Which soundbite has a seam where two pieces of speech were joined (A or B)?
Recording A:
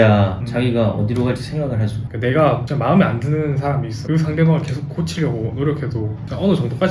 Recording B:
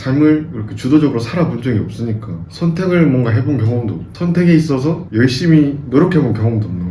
A